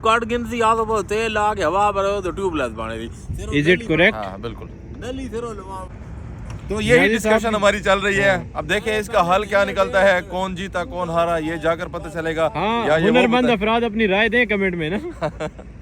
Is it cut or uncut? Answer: cut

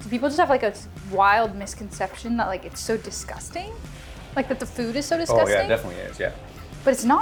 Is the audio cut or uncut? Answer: uncut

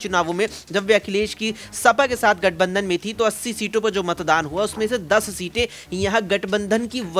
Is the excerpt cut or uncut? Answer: uncut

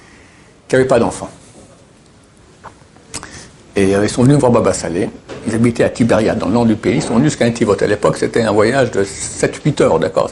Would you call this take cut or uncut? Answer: uncut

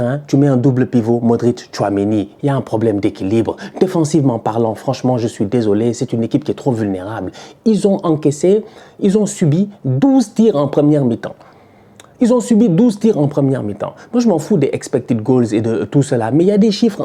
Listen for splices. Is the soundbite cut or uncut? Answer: uncut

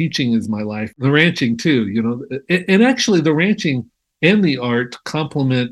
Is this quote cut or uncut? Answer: cut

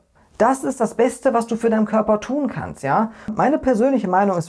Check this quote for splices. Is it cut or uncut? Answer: cut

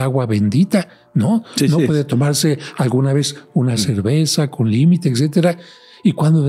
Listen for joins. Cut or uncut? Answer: uncut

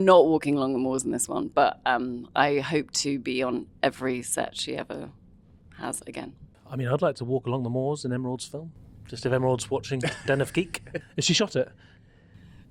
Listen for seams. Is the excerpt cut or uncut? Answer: cut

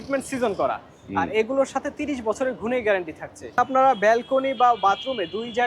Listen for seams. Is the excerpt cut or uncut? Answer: cut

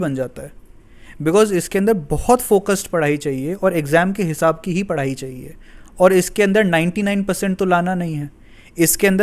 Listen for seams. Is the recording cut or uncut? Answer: uncut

